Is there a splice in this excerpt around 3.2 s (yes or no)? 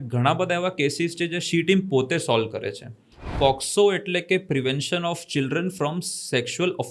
yes